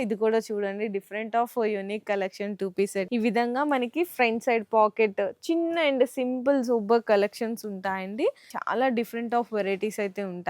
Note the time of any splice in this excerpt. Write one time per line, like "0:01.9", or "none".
0:03.1
0:08.5